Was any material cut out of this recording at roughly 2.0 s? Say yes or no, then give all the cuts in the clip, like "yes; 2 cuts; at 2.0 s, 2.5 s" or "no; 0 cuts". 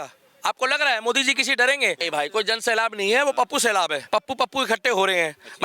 yes; 2 cuts; at 2.0 s, 4.0 s